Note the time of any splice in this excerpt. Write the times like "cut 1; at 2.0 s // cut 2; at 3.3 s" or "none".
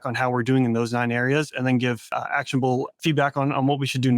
cut 1; at 2.1 s // cut 2; at 2.9 s